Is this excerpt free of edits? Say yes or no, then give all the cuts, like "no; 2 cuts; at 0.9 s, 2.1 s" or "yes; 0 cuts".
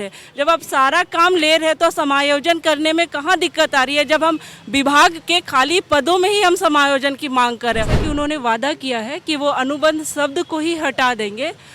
no; 1 cut; at 8.0 s